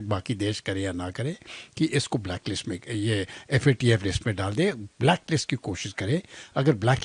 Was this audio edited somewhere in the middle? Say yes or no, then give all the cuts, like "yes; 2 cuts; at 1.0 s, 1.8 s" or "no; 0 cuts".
no; 0 cuts